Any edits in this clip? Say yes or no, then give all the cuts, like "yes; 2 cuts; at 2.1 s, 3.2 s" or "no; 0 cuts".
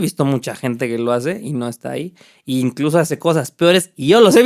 no; 0 cuts